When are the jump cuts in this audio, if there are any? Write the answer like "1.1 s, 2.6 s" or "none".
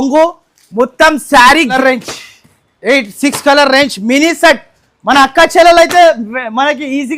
1.7 s